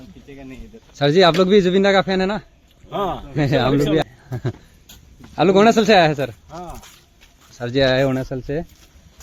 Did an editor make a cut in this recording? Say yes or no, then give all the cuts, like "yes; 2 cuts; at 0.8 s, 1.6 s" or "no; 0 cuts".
yes; 1 cut; at 4.0 s